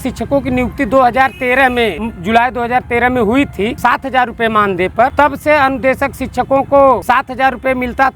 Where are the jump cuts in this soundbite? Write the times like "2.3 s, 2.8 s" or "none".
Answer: 2.1 s, 3.8 s, 5.1 s, 7.0 s